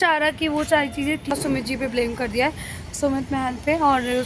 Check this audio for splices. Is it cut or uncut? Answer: cut